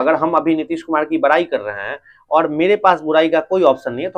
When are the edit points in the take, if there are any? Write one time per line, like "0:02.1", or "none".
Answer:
none